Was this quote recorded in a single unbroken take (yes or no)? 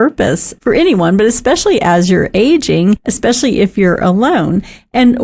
no